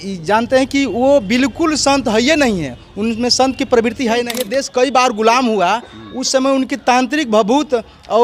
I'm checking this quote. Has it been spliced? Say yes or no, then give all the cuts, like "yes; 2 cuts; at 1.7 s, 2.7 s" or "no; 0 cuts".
yes; 1 cut; at 4.3 s